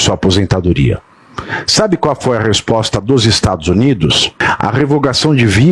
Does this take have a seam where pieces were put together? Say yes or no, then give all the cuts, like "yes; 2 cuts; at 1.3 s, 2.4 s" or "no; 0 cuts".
yes; 1 cut; at 4.3 s